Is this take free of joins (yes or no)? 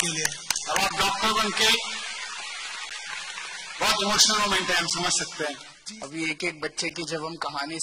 no